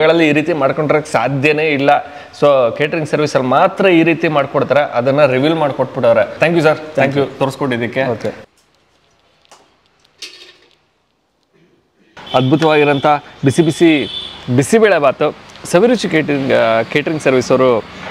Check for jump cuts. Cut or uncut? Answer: uncut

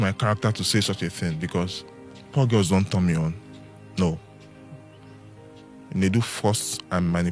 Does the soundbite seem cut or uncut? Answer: uncut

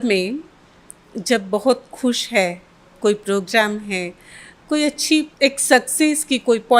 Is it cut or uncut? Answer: cut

